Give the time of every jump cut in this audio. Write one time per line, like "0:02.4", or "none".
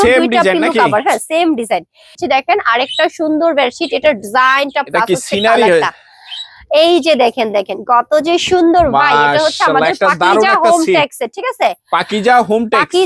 0:02.1